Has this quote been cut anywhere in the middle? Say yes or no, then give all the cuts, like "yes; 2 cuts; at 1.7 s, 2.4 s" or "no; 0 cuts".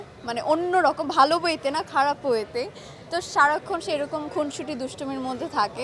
no; 0 cuts